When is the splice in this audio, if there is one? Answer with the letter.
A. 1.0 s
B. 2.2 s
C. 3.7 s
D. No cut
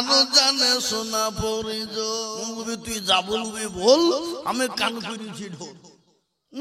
B